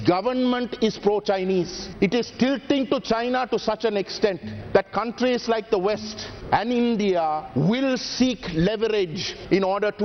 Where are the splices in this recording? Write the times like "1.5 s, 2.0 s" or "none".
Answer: none